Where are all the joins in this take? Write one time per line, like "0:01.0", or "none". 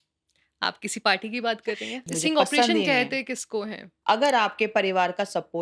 0:01.9
0:03.9